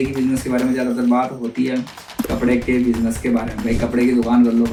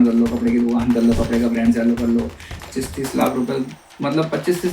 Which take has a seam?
second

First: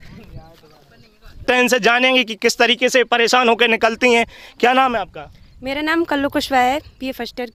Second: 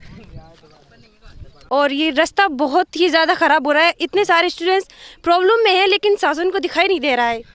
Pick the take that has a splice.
second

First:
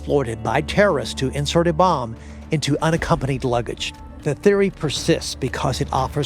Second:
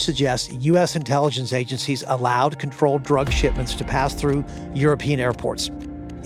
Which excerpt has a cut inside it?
first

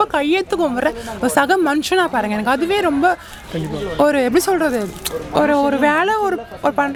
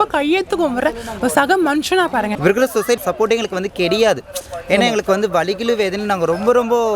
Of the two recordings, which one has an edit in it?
second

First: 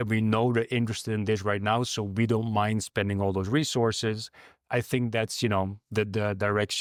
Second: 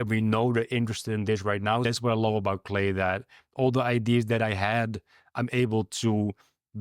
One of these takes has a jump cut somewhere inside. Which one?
second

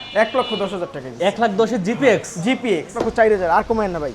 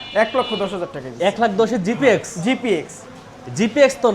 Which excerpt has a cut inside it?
first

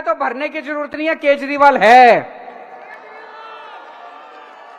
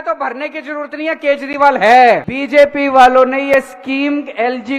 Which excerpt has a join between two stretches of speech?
second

